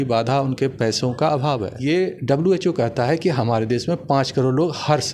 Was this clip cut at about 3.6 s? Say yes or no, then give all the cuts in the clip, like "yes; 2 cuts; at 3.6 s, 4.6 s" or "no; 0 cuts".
no; 1 cut; at 1.7 s